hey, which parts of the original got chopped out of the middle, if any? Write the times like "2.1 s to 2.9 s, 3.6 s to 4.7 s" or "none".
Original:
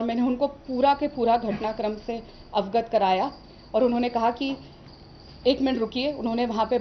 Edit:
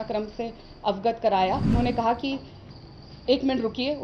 3.4 s to 3.9 s